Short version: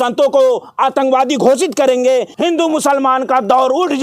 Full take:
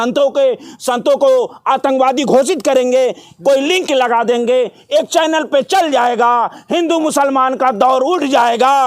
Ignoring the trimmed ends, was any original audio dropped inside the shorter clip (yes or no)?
yes